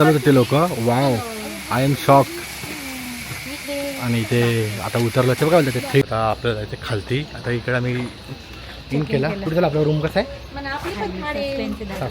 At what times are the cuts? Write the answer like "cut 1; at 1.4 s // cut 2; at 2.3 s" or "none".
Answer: cut 1; at 6.0 s